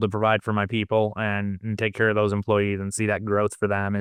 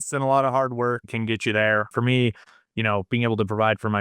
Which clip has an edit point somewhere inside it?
second; 2 cuts; at 1.0 s, 1.9 s

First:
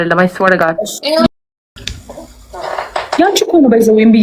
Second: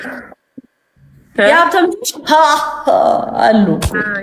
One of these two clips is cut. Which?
first; 1 cut; at 1.3 s

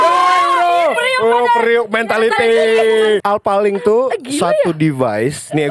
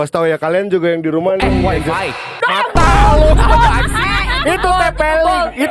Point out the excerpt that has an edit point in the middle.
first; 1 cut; at 3.2 s

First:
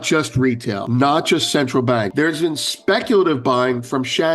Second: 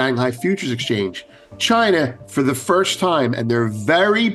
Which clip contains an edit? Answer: first; 2 cuts; at 0.8 s, 2.1 s

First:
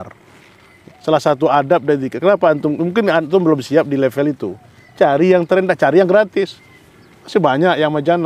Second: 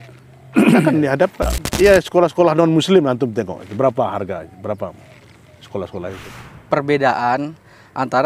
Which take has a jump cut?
second; 2 cuts; at 1.6 s, 6.4 s

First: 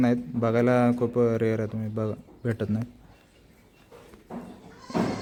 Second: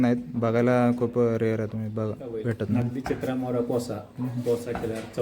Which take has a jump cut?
second; 1 cut; at 2.8 s

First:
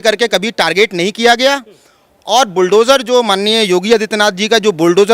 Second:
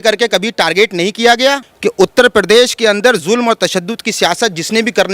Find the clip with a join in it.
second; 1 cut; at 1.7 s

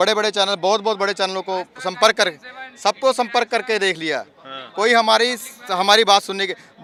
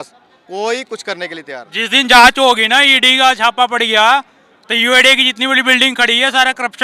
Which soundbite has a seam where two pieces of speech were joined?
second; 1 cut; at 1.6 s

